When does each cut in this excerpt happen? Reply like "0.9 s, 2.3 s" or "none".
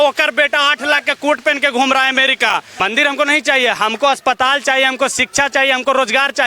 2.7 s